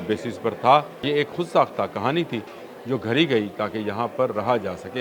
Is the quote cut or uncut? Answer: cut